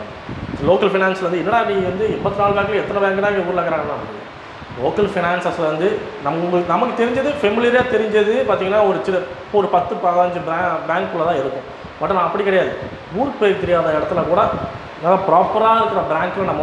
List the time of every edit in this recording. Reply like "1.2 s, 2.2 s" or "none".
none

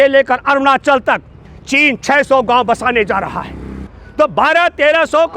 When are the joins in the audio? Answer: 3.8 s

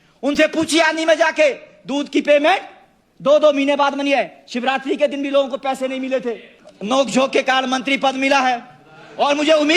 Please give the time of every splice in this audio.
6.5 s

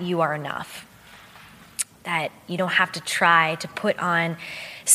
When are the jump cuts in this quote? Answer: none

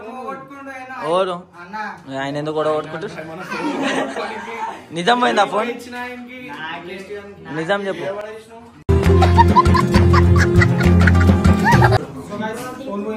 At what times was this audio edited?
12.0 s

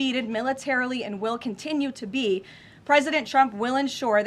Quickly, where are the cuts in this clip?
none

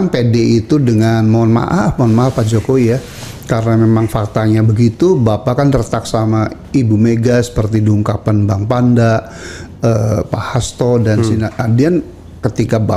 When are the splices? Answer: none

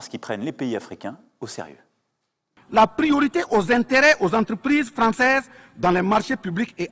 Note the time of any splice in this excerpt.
2.4 s

